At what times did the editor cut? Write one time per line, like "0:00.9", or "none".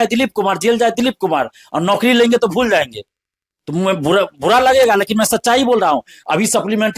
none